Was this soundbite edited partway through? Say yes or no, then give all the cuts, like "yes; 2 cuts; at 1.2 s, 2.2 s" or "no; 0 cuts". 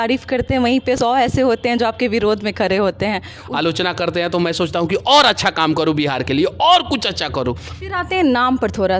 yes; 3 cuts; at 1.0 s, 3.4 s, 7.7 s